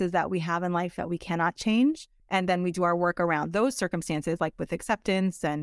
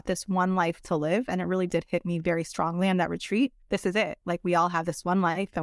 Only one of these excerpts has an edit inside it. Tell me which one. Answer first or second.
first